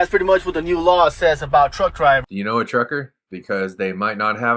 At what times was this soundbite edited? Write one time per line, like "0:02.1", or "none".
0:02.3